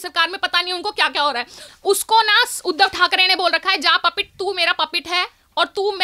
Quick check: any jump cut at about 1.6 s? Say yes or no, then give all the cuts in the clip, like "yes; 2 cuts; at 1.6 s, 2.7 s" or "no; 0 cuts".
yes; 1 cut; at 1.6 s